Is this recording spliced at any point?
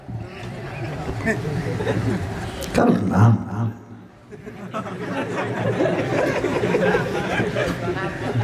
no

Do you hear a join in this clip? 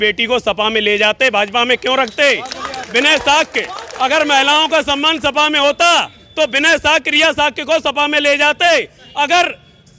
no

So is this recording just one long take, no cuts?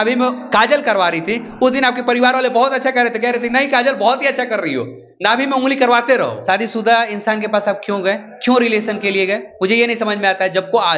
no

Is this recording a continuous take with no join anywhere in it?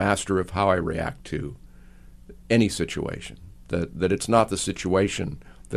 yes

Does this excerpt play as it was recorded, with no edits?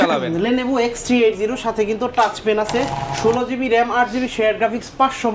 no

